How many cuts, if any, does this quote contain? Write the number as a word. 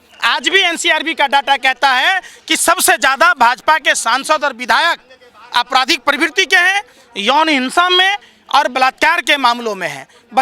zero